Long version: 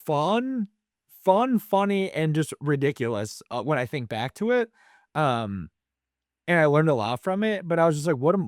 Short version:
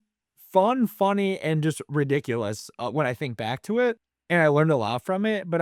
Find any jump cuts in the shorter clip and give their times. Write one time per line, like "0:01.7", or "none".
0:04.1